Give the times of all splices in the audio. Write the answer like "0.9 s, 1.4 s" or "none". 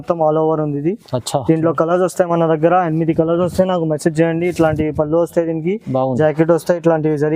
none